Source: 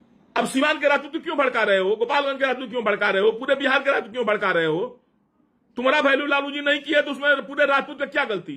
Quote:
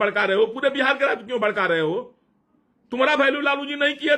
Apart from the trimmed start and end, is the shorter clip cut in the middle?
no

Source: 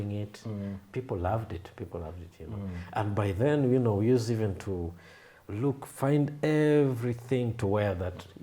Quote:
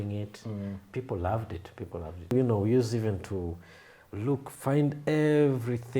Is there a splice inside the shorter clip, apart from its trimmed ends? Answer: yes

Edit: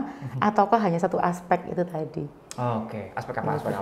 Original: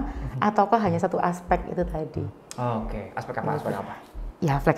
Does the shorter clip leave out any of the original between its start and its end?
no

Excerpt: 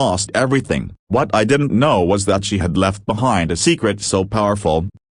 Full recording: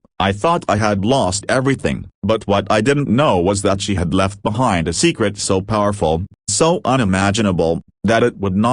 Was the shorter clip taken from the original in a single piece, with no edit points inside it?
no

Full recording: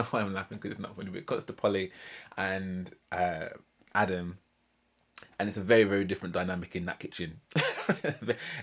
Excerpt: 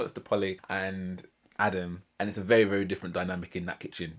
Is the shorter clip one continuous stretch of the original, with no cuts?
no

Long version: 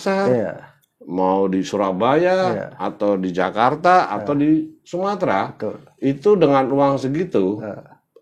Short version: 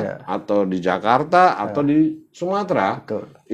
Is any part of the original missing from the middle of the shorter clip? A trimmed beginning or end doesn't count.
no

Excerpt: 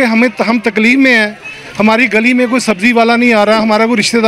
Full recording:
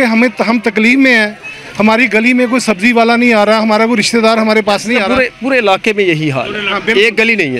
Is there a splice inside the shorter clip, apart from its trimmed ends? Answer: no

